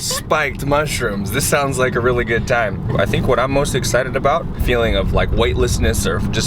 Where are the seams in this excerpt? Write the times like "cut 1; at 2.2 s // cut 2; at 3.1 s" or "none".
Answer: none